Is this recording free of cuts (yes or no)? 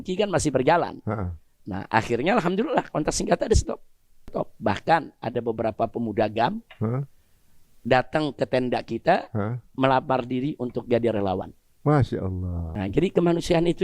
no